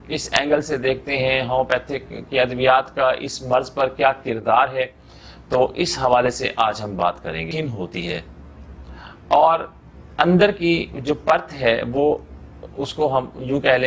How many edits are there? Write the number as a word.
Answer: one